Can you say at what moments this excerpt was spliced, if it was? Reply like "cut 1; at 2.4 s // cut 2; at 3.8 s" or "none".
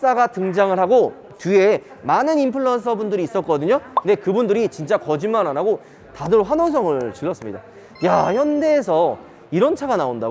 none